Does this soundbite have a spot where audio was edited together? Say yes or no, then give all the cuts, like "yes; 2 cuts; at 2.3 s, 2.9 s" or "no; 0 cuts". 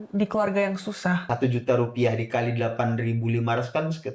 yes; 1 cut; at 1.3 s